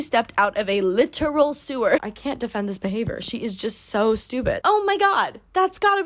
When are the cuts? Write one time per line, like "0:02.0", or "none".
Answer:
0:02.0
0:04.6